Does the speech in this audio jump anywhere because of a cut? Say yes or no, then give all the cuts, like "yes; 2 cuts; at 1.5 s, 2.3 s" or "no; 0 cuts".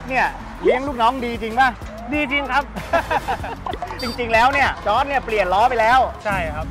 yes; 1 cut; at 4.0 s